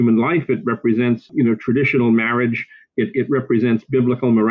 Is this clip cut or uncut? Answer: cut